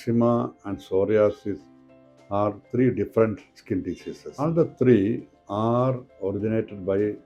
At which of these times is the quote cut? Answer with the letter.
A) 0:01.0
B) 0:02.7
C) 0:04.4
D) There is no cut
C